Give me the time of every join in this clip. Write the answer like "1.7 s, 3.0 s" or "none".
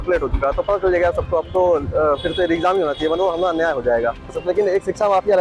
4.4 s